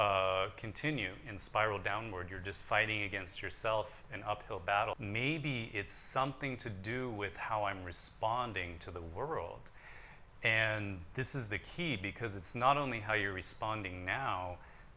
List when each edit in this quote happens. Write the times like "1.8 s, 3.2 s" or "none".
4.9 s